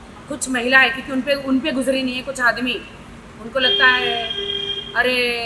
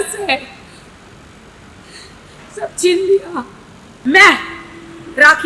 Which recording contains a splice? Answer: second; 1 cut; at 4.0 s

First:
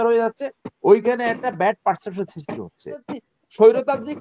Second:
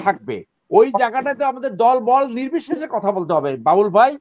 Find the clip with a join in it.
first; 1 cut; at 3.2 s

